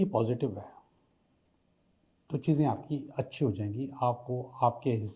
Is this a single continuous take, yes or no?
yes